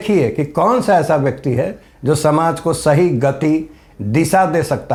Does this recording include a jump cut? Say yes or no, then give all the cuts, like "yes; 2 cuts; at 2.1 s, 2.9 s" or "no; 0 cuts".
no; 0 cuts